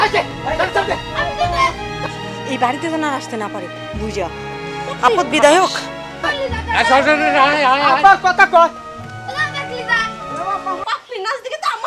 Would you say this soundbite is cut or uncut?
cut